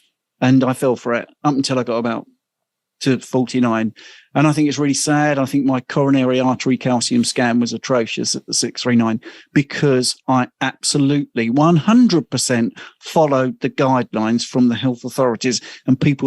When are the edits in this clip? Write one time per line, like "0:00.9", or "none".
none